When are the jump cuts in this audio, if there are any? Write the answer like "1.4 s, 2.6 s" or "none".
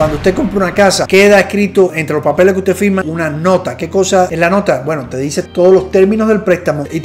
1.0 s, 4.3 s